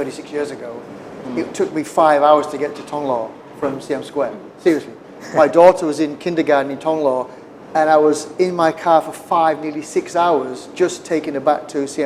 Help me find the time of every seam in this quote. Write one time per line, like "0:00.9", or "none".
none